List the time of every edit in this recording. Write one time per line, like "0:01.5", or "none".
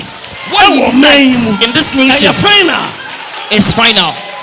none